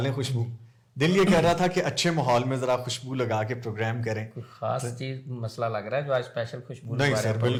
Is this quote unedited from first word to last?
yes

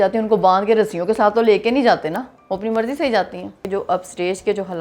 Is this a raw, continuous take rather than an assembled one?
no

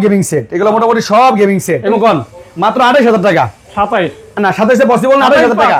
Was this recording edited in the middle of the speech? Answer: yes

